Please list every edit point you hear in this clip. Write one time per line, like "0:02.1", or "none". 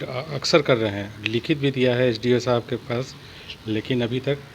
none